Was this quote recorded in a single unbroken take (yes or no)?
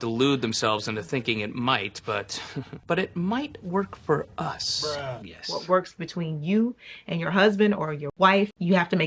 yes